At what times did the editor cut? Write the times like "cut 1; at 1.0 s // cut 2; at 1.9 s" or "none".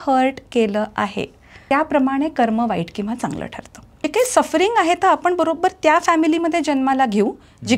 cut 1; at 1.5 s // cut 2; at 4.1 s